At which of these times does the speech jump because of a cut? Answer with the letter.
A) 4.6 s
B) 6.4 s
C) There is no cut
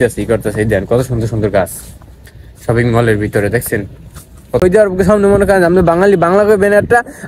A